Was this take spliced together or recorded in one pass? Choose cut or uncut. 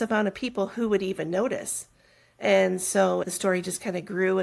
cut